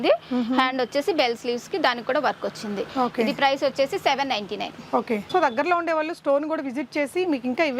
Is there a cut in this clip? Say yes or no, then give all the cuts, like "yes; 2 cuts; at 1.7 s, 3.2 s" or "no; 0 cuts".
no; 0 cuts